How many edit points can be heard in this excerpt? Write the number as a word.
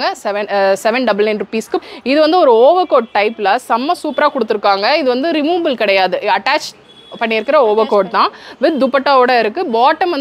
one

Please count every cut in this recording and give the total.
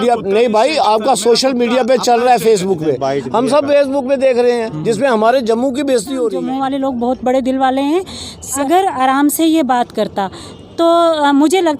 two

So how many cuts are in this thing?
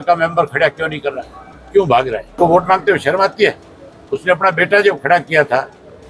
one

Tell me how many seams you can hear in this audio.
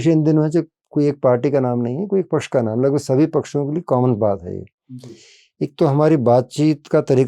zero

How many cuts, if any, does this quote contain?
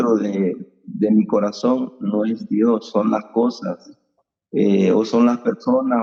zero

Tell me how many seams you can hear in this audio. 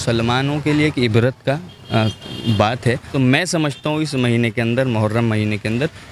one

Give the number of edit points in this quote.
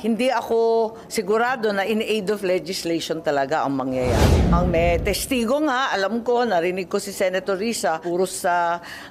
two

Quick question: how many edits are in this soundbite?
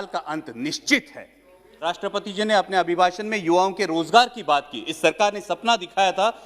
one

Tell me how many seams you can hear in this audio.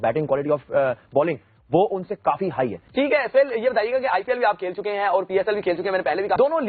zero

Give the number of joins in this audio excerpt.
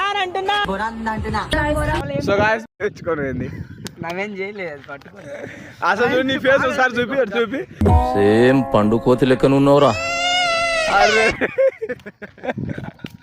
one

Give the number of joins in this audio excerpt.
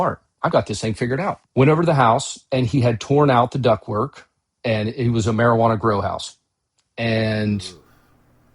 one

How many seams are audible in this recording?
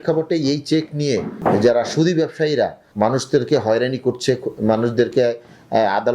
two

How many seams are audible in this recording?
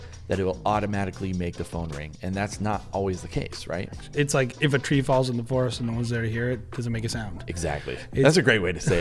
one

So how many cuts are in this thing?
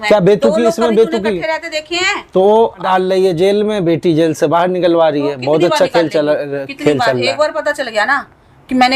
one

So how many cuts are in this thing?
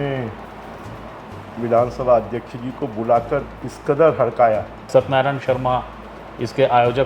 one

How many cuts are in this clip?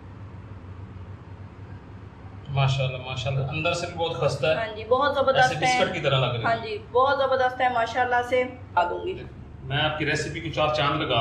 one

